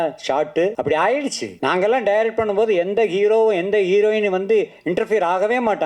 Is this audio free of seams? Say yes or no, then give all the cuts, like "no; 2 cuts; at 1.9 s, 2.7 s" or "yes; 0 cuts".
no; 2 cuts; at 0.8 s, 1.5 s